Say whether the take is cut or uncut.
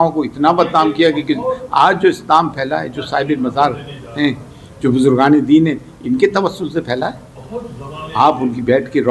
uncut